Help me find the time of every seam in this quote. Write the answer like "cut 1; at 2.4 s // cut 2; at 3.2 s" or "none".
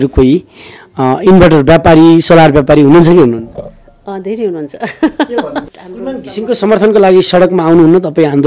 cut 1; at 5.7 s